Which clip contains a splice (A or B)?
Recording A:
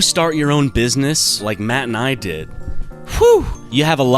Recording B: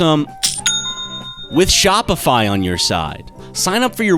A